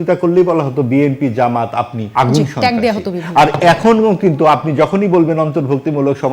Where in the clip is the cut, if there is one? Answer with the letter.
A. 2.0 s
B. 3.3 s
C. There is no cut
A